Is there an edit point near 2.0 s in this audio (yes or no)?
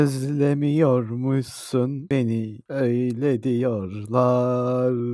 yes